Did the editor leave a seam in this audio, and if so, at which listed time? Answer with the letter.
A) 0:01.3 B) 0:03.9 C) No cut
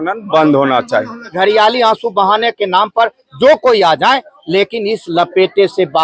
A